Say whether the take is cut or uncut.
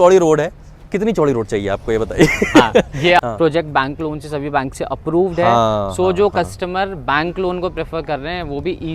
cut